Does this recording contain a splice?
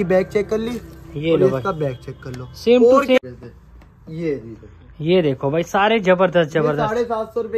yes; 1 cut; at 3.2 s

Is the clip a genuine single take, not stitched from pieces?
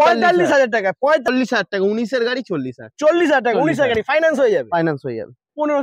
no; 1 cut; at 1.3 s

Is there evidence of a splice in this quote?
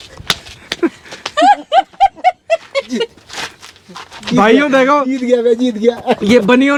no; 0 cuts

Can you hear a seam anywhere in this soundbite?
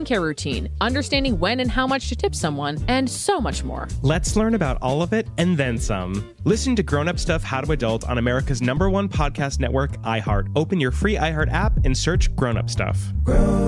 no; 0 cuts

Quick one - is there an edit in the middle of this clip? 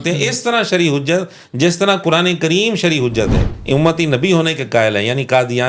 yes; 1 cut; at 3.5 s

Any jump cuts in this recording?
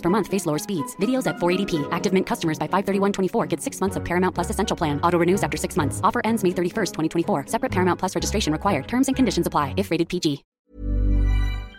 yes; 1 cut; at 10.5 s

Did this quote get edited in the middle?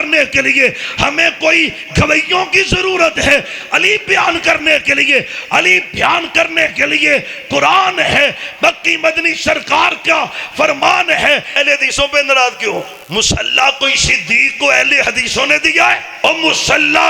yes; 3 cuts; at 11.6 s, 13.0 s, 16.1 s

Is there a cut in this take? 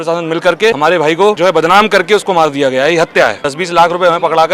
yes; 2 cuts; at 1.0 s, 3.4 s

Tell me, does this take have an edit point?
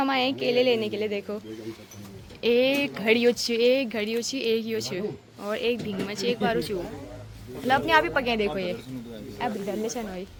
no; 0 cuts

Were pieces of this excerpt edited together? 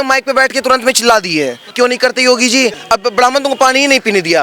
yes; 2 cuts; at 1.6 s, 2.8 s

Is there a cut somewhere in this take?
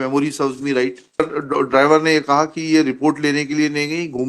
yes; 1 cut; at 1.2 s

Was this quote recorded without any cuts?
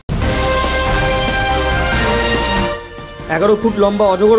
yes; 0 cuts

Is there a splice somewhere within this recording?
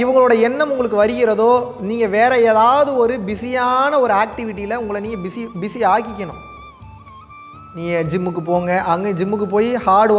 no; 0 cuts

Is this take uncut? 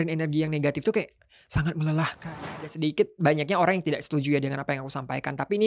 no; 1 cut; at 2.2 s

